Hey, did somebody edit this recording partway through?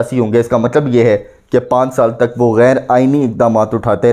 no; 0 cuts

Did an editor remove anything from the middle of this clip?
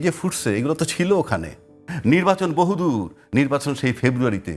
yes; 1 cut; at 1.9 s

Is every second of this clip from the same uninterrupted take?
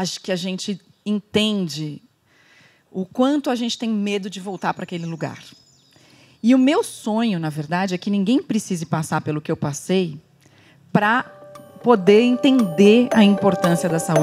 yes; 0 cuts

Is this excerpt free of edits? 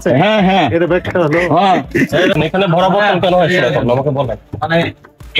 no; 1 cut; at 2.4 s

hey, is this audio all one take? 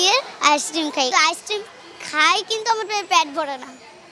no; 1 cut; at 1.1 s

